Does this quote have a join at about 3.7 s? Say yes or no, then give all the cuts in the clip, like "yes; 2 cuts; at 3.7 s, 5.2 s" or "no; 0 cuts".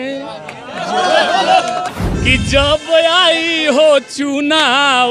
no; 1 cut; at 1.9 s